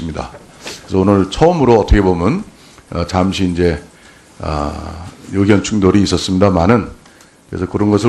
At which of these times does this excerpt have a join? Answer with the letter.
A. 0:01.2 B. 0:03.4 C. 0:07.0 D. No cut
A